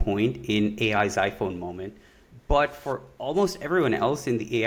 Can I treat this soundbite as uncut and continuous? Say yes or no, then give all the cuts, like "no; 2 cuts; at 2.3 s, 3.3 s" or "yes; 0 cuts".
yes; 0 cuts